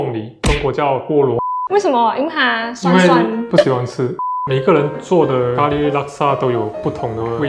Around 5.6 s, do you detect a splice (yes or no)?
no